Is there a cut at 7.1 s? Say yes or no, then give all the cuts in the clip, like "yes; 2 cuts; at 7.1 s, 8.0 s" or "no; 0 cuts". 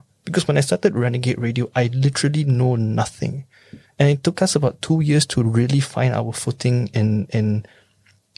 no; 0 cuts